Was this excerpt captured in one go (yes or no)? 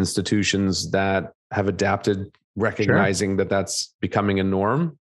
no